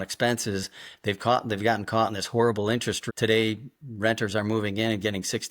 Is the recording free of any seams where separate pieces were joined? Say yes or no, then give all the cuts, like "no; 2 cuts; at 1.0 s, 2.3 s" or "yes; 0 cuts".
no; 1 cut; at 3.0 s